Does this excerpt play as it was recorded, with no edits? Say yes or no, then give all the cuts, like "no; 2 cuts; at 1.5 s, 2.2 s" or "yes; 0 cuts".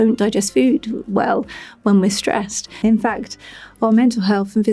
no; 1 cut; at 2.8 s